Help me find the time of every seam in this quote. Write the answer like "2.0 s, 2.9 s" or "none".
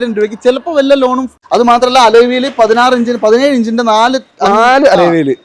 1.3 s